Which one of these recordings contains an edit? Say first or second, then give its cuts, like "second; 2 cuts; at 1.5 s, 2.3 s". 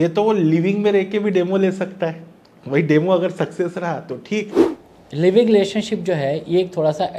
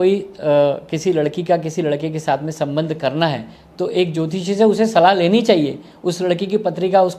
first; 1 cut; at 4.6 s